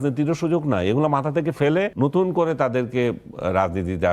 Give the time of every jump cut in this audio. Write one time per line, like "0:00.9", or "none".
0:01.9